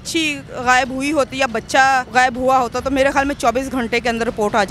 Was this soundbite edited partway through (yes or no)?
yes